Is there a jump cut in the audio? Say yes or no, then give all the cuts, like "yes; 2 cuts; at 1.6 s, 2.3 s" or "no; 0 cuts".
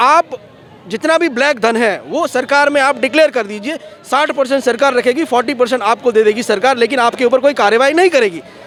no; 0 cuts